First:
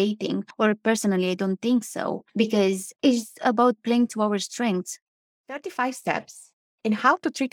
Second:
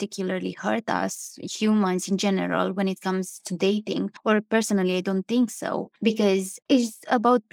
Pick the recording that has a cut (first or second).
first